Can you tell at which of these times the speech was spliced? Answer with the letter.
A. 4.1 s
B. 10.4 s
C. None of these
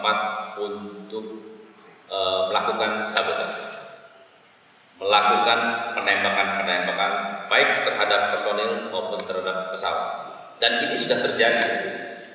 C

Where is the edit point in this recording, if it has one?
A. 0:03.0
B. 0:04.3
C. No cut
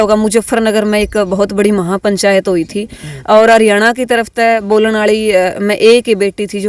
C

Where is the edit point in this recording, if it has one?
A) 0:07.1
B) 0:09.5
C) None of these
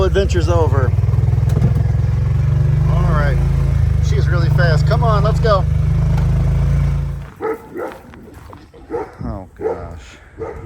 A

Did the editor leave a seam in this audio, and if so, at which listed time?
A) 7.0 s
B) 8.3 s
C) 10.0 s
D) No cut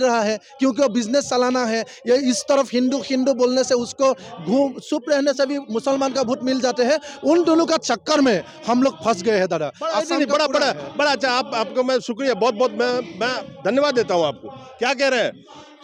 D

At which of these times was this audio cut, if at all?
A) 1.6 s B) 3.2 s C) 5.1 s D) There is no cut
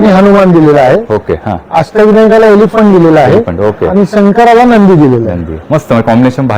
D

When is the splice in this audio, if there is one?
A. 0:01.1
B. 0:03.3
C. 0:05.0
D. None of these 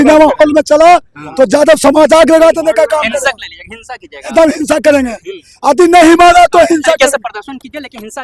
D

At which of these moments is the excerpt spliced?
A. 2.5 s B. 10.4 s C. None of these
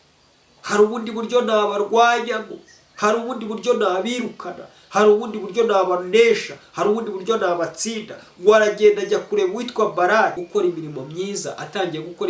B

